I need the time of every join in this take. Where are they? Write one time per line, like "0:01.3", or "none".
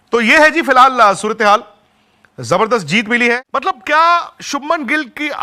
0:03.4